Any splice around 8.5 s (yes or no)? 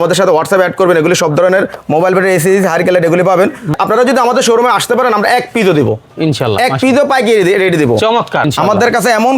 yes